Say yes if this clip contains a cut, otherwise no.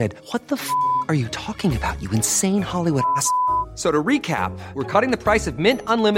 no